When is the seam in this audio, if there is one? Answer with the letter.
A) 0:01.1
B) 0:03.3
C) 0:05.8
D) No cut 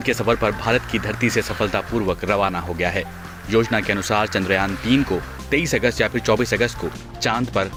D